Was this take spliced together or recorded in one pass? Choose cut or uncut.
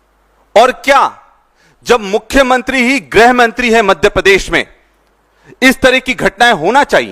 uncut